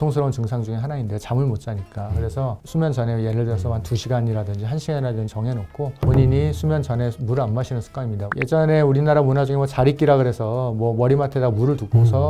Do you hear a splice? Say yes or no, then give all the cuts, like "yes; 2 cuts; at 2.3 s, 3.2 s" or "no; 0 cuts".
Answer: no; 0 cuts